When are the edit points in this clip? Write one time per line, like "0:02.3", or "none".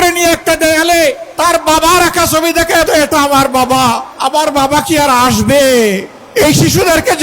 0:01.3
0:02.9
0:04.1
0:06.1